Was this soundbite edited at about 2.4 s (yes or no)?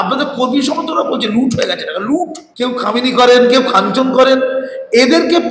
yes